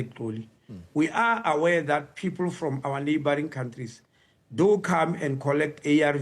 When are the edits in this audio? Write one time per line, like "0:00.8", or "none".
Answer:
none